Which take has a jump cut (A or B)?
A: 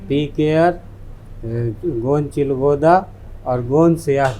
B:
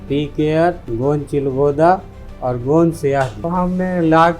B